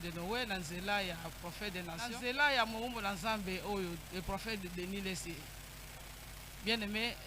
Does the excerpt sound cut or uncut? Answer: cut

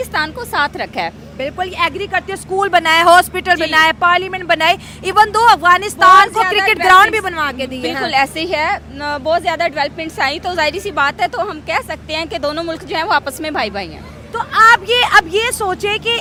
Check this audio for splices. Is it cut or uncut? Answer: uncut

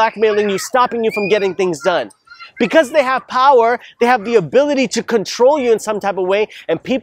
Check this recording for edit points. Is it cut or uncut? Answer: uncut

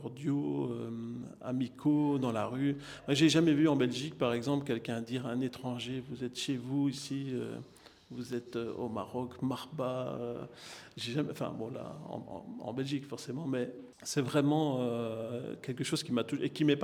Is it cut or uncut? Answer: uncut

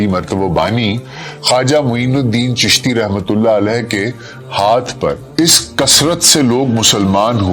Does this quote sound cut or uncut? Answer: cut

